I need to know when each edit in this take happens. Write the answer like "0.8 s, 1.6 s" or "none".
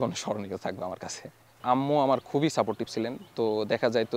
1.6 s